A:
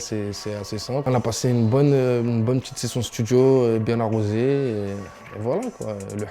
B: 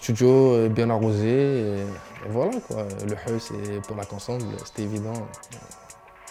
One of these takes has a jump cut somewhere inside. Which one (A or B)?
A